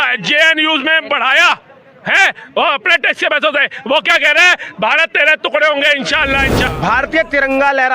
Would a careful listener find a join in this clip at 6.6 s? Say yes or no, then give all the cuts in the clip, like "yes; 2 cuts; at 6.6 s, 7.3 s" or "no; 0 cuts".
yes; 1 cut; at 6.6 s